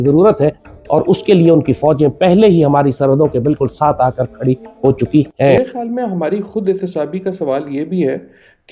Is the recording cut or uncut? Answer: cut